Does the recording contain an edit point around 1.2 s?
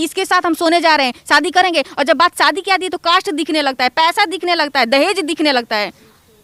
no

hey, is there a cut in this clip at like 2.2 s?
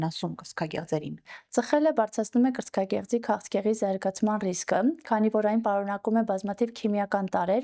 no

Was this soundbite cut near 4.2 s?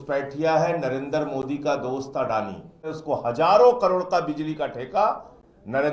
no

